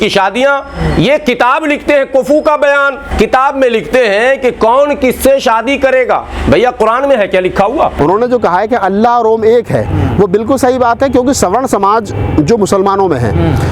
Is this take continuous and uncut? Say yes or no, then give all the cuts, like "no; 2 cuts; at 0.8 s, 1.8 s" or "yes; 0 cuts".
no; 2 cuts; at 3.0 s, 8.0 s